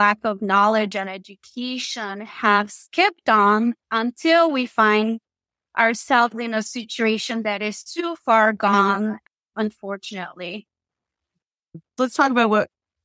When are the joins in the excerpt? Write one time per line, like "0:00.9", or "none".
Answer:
0:11.9